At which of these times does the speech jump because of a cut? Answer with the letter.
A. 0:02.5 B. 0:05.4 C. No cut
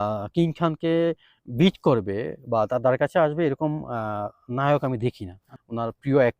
B